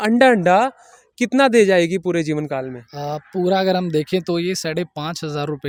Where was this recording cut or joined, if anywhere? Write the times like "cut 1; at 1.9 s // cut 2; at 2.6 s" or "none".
none